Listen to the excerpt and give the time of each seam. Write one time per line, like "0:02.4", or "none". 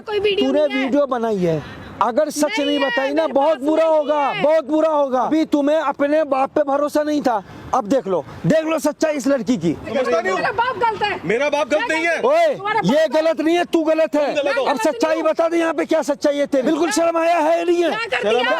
0:05.3
0:09.9
0:16.7